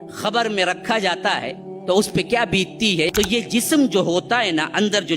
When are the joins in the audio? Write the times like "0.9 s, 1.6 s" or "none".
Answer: 3.1 s